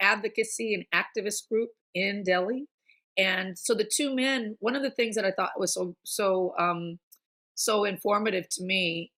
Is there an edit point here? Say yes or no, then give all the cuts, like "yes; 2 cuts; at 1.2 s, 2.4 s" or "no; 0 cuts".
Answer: no; 0 cuts